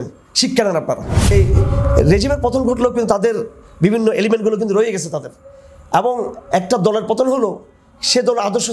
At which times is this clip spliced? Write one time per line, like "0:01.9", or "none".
0:01.3